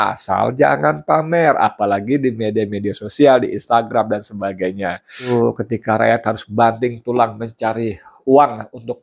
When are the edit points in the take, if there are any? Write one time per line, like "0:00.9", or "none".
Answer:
0:05.3